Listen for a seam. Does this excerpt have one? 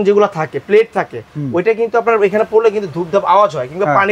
no; 0 cuts

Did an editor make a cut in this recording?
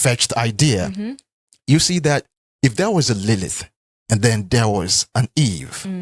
no; 0 cuts

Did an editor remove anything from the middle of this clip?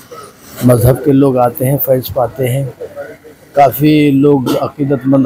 no; 0 cuts

